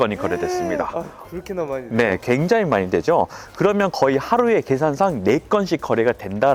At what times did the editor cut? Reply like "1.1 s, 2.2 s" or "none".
none

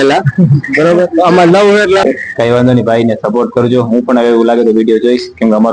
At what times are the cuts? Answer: 2.0 s

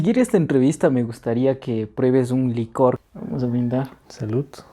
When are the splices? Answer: 3.0 s

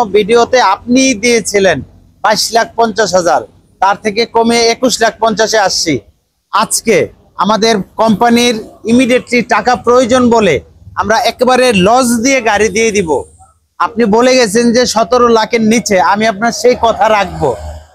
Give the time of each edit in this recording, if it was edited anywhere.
none

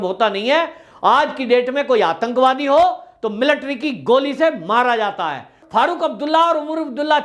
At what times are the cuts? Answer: 5.6 s

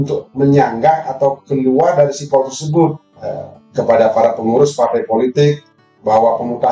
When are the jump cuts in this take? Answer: 3.1 s

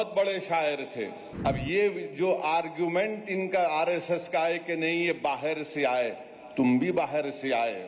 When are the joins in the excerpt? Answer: 1.2 s

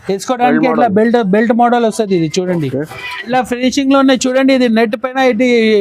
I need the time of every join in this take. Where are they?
3.3 s

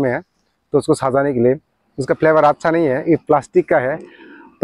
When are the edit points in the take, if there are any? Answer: none

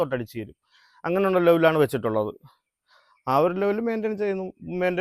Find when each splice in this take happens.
none

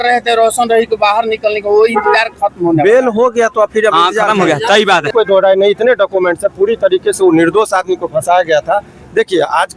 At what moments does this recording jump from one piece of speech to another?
5.1 s

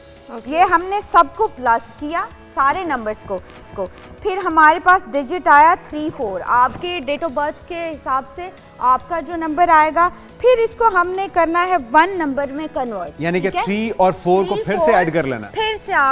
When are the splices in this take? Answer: none

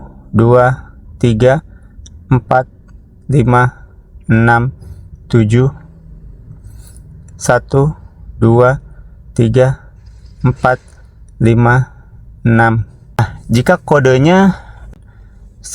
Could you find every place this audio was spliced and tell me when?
13.2 s, 14.9 s

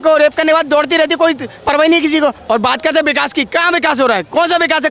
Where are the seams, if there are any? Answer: 2.4 s

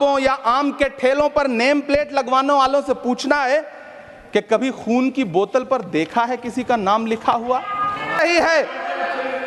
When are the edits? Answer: 8.2 s

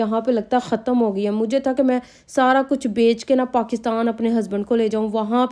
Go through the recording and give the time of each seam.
none

